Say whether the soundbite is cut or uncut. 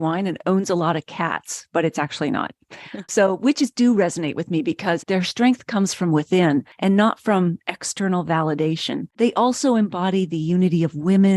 cut